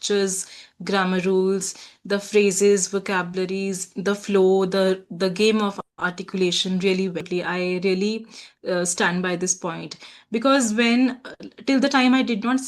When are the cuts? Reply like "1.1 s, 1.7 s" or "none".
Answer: 7.3 s